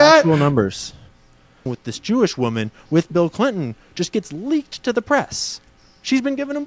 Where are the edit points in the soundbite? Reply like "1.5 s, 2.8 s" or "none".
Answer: 1.6 s